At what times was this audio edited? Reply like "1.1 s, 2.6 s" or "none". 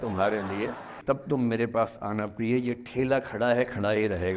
0.9 s